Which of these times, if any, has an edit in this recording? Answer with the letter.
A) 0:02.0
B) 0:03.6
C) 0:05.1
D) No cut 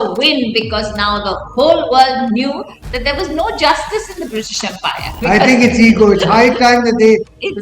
C